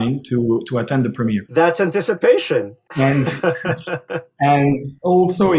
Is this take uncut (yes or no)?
yes